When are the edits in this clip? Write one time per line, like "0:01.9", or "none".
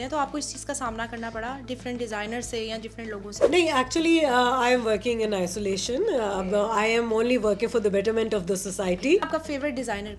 0:03.3
0:09.3

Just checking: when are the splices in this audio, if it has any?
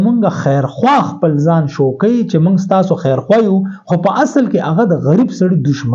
none

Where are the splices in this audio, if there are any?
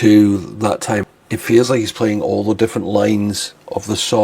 0:01.1

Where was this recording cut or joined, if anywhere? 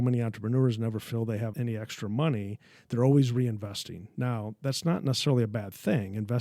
0:01.5

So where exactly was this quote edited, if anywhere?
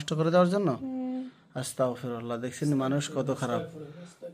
none

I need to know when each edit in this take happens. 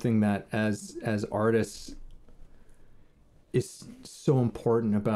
0:03.2

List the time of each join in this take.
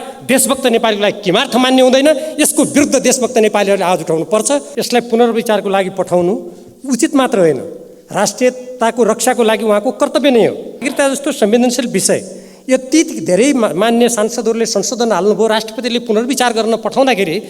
0:04.6
0:10.9

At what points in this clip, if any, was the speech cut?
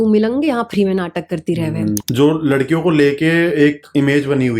0:02.0

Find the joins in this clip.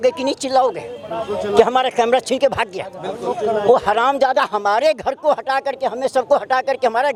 none

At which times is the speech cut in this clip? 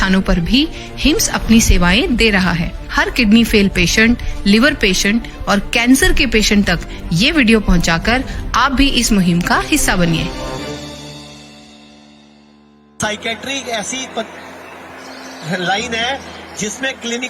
0:13.0

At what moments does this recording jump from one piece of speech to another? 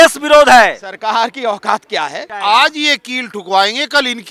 0:02.2

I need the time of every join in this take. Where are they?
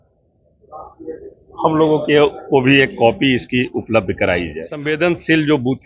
0:04.8

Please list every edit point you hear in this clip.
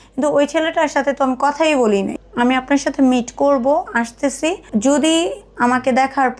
0:02.2
0:04.6

